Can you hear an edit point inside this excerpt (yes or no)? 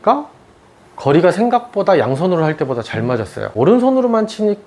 yes